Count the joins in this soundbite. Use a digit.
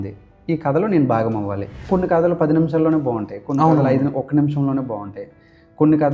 1